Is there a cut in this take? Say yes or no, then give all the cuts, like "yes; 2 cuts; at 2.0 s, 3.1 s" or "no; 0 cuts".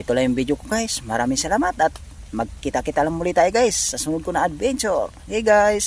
no; 0 cuts